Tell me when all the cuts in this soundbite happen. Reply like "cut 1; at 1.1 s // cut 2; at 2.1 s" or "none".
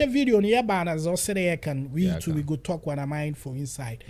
none